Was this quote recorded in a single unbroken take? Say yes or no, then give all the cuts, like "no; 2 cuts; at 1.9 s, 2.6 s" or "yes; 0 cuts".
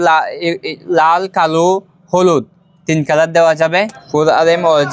no; 1 cut; at 4.0 s